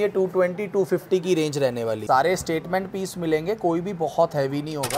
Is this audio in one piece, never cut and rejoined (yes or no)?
no